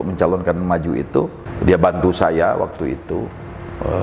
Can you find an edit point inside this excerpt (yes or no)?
yes